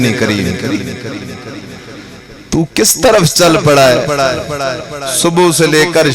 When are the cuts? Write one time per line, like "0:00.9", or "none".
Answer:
none